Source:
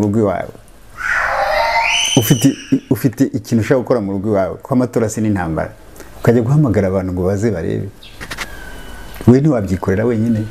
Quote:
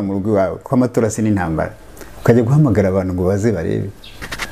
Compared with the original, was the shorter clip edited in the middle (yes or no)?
no